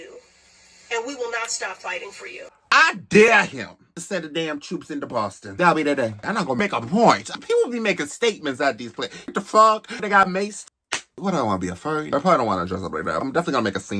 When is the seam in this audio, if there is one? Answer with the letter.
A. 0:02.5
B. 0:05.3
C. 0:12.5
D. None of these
A